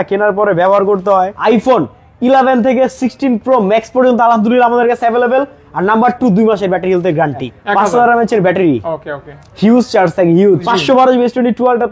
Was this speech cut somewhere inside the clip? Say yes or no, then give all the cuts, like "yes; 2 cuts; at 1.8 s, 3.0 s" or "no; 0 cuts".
yes; 3 cuts; at 1.3 s, 7.5 s, 10.7 s